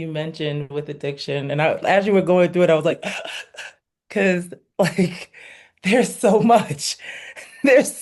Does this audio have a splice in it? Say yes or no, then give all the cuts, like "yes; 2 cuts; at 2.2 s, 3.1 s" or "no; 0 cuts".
no; 0 cuts